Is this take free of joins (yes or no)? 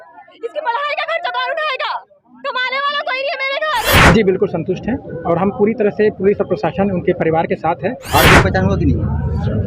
no